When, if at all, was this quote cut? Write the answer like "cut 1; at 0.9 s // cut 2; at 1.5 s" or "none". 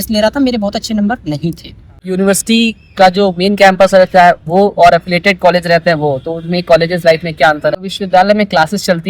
cut 1; at 2.0 s // cut 2; at 7.8 s